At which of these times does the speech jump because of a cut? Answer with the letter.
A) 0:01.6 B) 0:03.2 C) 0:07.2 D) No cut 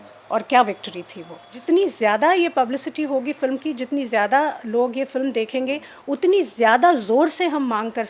A